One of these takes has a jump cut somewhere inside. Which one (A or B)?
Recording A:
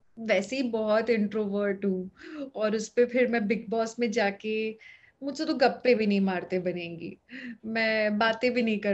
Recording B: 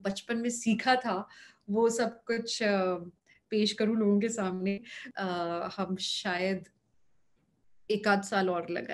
B